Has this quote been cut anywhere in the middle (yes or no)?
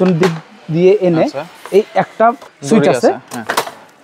yes